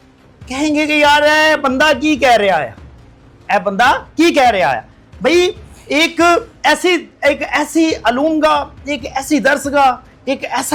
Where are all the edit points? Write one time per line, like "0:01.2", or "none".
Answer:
none